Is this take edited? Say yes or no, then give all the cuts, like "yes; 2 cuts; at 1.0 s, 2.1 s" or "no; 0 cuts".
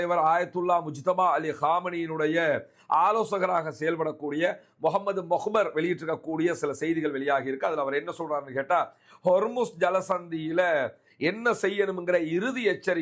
no; 0 cuts